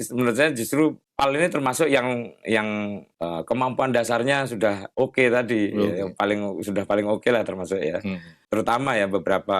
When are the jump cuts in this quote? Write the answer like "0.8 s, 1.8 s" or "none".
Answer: 1.0 s, 3.1 s, 4.8 s, 8.3 s